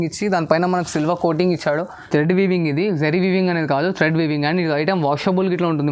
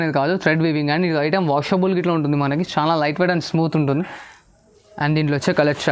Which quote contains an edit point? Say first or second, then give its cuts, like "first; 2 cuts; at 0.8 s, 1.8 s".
first; 1 cut; at 2.1 s